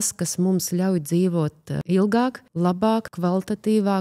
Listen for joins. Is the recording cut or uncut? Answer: cut